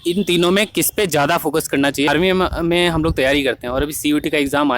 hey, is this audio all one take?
no; 1 cut; at 2.1 s

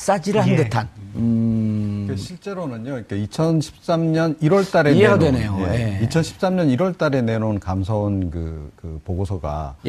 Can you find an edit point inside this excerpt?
yes; 1 cut; at 5.7 s

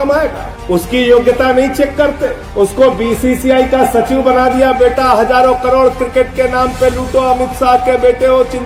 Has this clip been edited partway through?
no; 0 cuts

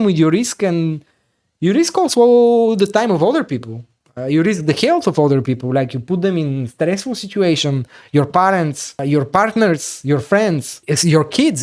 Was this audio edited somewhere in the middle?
yes; 2 cuts; at 8.9 s, 10.8 s

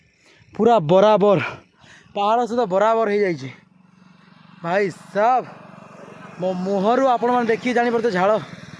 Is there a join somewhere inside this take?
no; 0 cuts

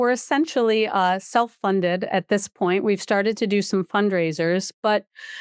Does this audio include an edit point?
no; 0 cuts

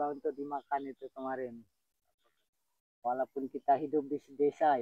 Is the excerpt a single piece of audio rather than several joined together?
no; 1 cut; at 2.2 s

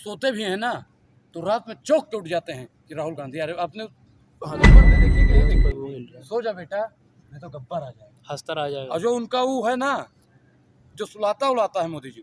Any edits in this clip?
yes; 2 cuts; at 4.6 s, 5.5 s

